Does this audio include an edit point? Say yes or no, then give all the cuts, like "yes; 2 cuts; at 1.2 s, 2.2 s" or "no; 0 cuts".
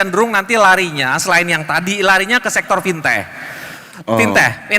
no; 0 cuts